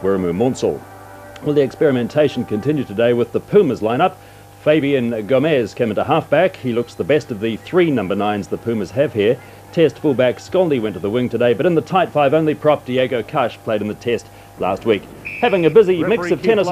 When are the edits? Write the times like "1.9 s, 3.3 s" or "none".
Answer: none